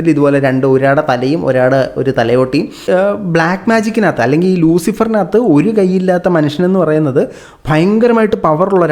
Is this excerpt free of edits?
no; 1 cut; at 2.8 s

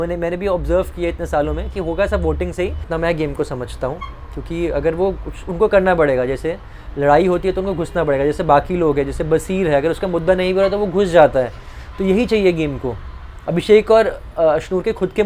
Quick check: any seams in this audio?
yes; 1 cut; at 2.8 s

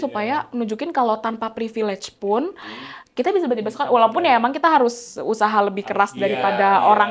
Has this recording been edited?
no; 0 cuts

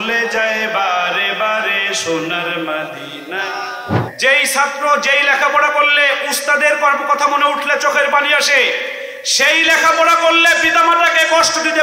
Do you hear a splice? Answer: yes; 1 cut; at 4.1 s

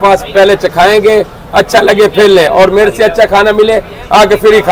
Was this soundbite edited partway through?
no; 0 cuts

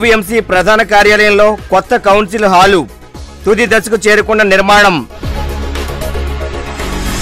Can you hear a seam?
no; 0 cuts

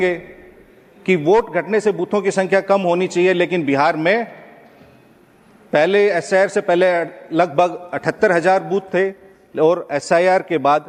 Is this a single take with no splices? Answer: yes; 0 cuts

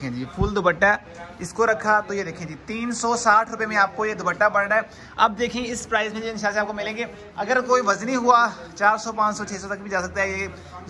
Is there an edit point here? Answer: no; 0 cuts

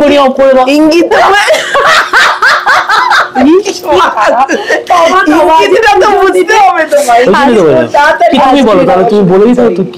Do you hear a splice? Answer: no; 0 cuts

